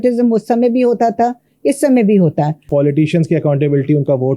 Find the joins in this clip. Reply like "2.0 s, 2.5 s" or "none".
2.6 s